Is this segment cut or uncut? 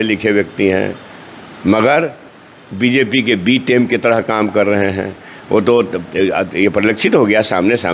uncut